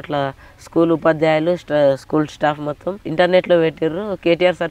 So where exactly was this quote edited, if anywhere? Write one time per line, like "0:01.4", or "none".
0:03.0